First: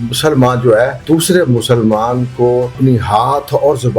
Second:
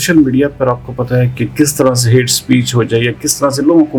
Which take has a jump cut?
first; 2 cuts; at 1.0 s, 2.7 s

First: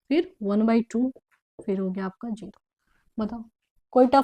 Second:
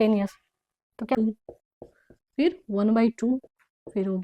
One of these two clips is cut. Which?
second; 1 cut; at 1.1 s

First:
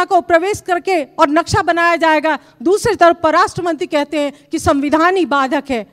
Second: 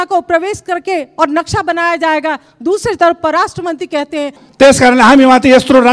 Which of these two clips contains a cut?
second; 1 cut; at 4.4 s

